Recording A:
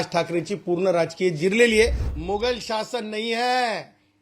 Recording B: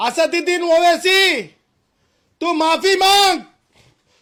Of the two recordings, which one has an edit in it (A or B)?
A